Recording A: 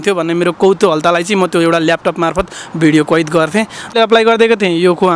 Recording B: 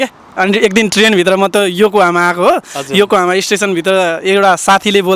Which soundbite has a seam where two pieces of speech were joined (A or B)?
A